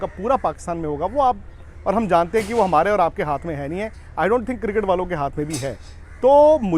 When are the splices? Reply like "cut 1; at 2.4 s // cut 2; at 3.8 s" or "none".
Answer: none